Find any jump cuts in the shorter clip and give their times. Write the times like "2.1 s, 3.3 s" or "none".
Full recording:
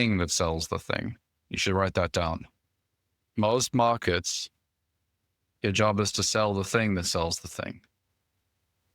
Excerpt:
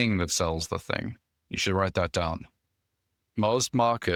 none